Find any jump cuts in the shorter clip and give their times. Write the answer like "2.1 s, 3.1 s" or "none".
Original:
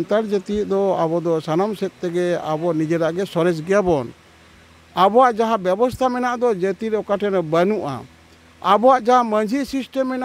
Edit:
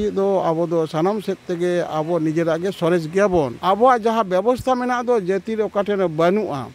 3.6 s

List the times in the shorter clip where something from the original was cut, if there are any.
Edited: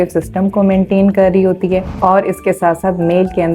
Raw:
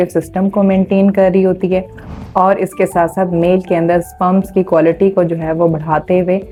1.9 s

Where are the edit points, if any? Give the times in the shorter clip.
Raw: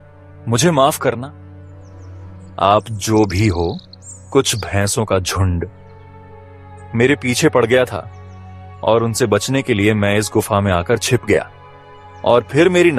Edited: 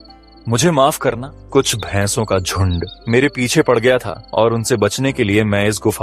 1.3 s, 2.9 s, 4.2 s

